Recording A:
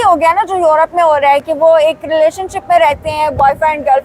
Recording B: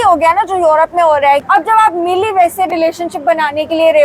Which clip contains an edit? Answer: B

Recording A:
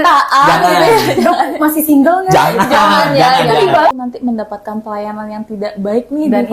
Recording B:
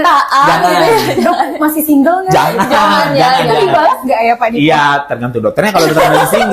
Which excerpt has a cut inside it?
A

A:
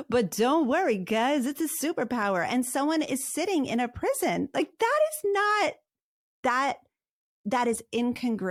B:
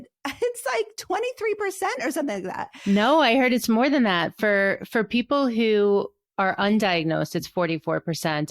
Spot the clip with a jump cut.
B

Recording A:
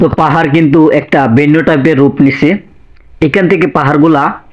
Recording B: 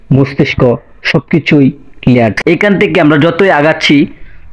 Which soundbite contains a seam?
B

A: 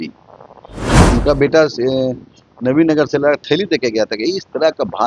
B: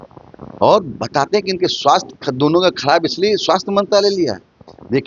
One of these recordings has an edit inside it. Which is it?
A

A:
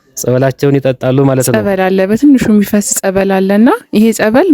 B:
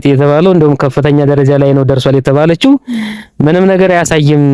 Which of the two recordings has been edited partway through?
A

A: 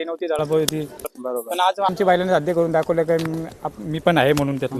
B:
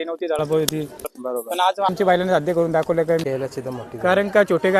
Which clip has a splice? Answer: B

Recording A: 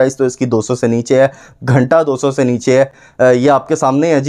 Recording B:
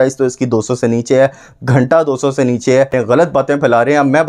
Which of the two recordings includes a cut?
B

